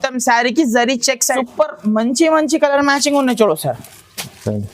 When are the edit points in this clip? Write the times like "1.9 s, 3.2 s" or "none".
1.3 s